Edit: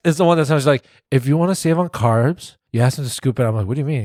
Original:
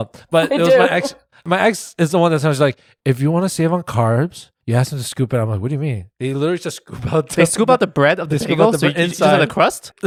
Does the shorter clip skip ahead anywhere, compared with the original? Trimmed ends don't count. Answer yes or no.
no